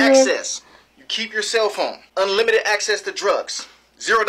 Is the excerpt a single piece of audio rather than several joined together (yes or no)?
no